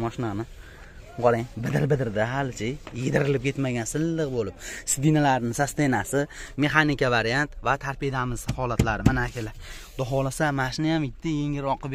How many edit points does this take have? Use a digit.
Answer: 0